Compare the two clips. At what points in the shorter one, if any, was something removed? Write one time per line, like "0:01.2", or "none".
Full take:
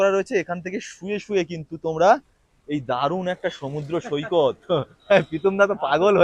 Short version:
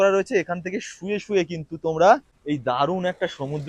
0:02.3